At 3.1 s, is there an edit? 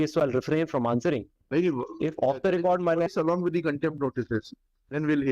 yes; 1 cut; at 3.1 s

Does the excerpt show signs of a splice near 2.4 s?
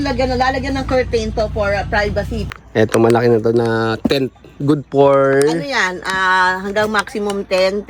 yes; 1 cut; at 2.4 s

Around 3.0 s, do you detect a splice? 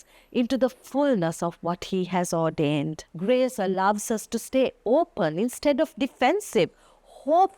yes; 1 cut; at 3.0 s

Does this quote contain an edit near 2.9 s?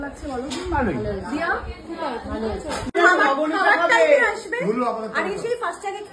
yes; 1 cut; at 2.9 s

